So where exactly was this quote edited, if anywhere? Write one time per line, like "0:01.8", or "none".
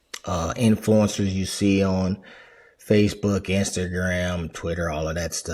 none